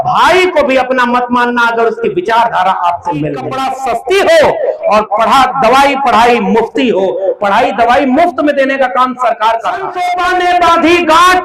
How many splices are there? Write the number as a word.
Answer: two